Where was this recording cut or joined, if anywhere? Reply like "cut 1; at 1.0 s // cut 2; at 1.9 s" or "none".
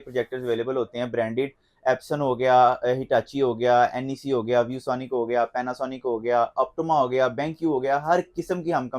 none